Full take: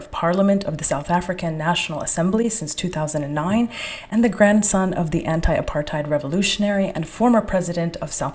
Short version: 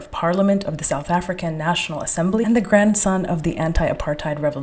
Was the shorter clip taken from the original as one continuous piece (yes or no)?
no